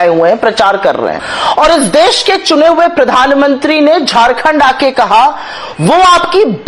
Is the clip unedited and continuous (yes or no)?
yes